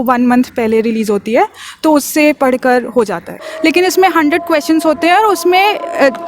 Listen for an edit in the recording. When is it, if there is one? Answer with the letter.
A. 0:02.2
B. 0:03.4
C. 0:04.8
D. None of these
B